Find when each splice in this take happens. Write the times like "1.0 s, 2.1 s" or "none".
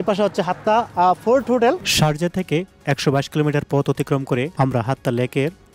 1.9 s, 4.5 s